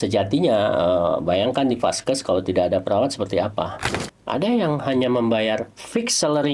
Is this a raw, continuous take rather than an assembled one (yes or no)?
no